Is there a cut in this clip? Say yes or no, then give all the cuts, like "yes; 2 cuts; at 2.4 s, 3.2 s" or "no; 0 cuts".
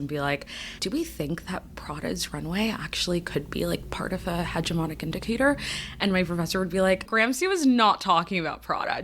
yes; 2 cuts; at 0.8 s, 7.1 s